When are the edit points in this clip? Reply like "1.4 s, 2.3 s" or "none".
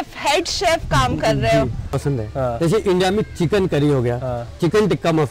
2.0 s